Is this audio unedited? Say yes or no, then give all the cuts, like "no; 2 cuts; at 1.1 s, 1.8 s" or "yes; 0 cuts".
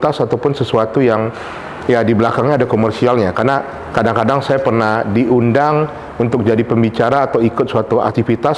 yes; 0 cuts